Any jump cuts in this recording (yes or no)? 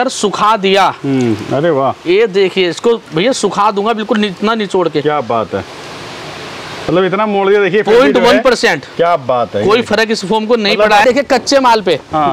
yes